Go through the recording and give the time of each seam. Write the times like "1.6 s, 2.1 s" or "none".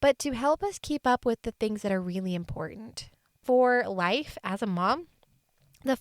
3.4 s